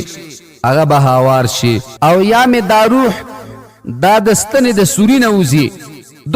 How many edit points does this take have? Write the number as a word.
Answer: one